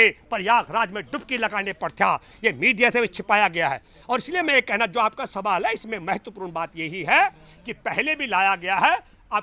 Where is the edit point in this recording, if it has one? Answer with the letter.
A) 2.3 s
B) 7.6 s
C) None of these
C